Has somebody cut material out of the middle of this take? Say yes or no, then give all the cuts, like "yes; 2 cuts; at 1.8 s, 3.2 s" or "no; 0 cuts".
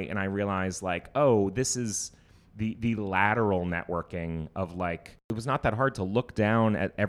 yes; 1 cut; at 5.3 s